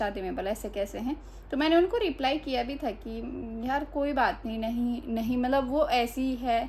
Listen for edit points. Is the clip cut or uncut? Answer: uncut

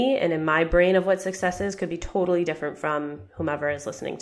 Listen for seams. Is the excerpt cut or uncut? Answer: uncut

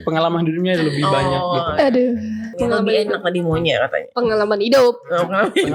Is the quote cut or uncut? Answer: cut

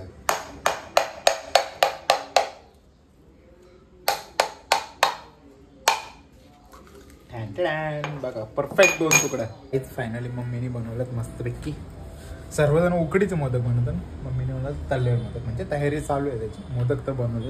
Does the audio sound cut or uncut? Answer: cut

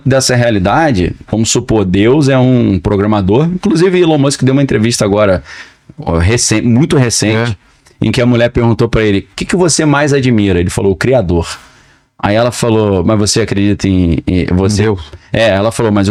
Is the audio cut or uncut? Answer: uncut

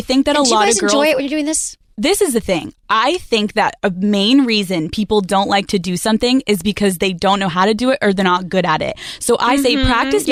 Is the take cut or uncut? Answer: uncut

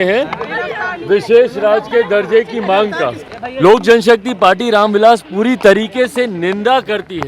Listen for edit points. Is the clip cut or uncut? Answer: cut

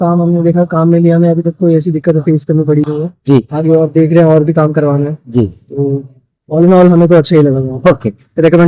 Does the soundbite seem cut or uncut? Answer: uncut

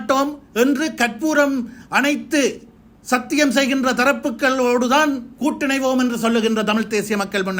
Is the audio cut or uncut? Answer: uncut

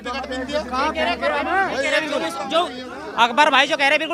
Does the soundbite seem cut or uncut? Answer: uncut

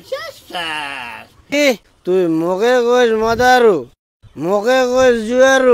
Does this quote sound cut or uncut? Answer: cut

